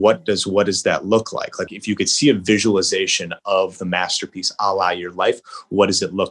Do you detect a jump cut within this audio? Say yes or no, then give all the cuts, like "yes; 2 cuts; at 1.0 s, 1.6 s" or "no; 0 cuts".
yes; 1 cut; at 1.7 s